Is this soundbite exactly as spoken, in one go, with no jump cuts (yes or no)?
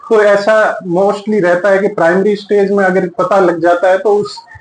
yes